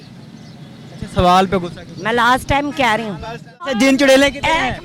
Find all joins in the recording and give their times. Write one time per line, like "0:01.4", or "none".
0:03.7